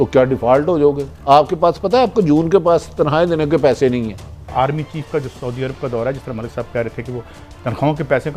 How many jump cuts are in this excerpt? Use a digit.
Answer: 1